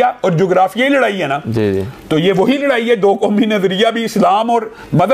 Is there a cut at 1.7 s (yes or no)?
no